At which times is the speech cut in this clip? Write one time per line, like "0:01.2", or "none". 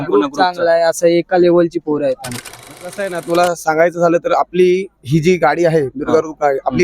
0:02.7